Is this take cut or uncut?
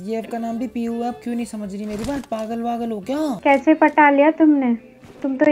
cut